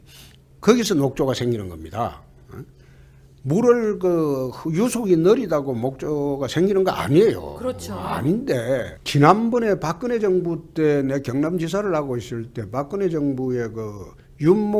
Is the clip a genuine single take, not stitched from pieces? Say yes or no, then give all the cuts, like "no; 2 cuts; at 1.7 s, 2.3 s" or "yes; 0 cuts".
yes; 0 cuts